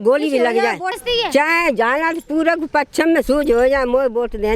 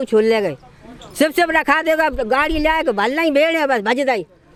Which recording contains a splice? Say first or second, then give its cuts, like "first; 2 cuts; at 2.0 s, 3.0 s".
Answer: first; 1 cut; at 1.0 s